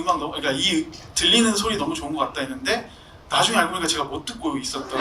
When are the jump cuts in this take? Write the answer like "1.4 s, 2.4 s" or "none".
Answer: none